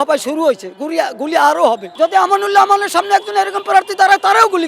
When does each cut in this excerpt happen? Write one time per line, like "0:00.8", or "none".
0:01.9